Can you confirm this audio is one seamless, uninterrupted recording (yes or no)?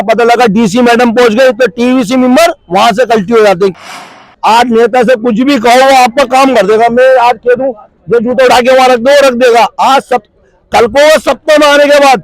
no